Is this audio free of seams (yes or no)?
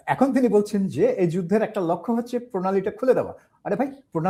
yes